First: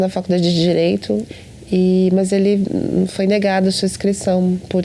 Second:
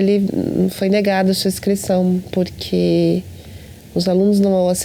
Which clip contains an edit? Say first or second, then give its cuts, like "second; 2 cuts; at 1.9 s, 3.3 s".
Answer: first; 1 cut; at 1.3 s